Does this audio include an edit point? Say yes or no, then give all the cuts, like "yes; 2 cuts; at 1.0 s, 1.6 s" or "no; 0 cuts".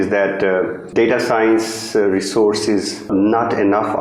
yes; 2 cuts; at 0.9 s, 3.1 s